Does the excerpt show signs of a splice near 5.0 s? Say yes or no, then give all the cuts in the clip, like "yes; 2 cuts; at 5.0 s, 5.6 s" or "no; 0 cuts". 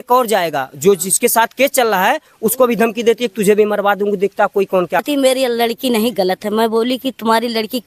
yes; 1 cut; at 5.0 s